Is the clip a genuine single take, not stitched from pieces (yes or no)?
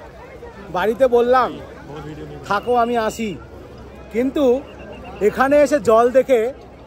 yes